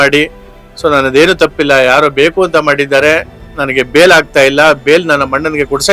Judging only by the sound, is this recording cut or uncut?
uncut